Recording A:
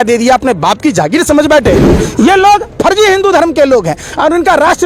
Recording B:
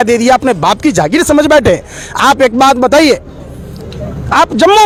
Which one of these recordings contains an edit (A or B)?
A